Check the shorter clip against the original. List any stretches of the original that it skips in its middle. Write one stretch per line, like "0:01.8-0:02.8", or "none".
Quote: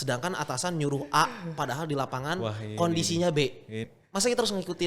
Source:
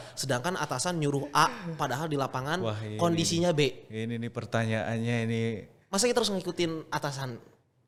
0:04.1-0:05.7